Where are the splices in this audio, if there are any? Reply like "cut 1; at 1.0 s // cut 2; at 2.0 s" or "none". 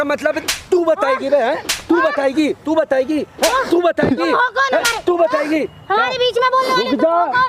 none